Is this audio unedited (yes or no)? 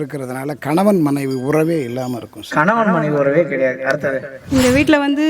no